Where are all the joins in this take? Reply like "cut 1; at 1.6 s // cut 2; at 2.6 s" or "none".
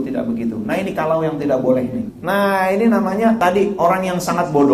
cut 1; at 2.1 s // cut 2; at 3.4 s